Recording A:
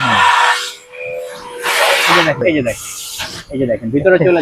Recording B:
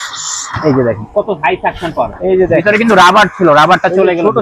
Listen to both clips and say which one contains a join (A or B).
A